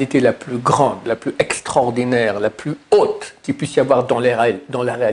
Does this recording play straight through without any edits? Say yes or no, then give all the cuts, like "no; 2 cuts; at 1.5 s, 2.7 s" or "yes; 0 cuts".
yes; 0 cuts